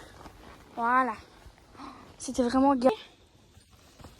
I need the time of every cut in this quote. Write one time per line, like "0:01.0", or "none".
0:02.9